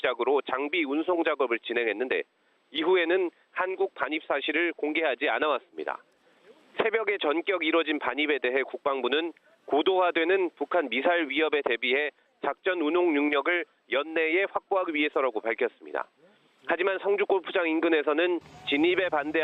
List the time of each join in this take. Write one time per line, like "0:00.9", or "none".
0:10.9